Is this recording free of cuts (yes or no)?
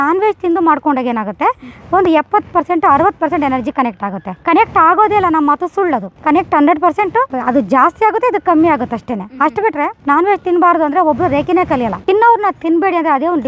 yes